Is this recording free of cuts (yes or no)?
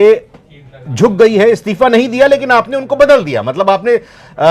yes